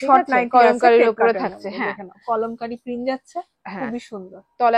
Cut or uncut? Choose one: uncut